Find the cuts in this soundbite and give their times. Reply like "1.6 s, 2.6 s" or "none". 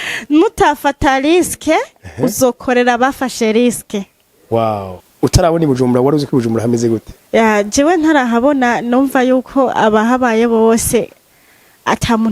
5.0 s